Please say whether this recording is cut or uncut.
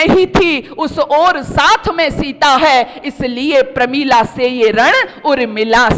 uncut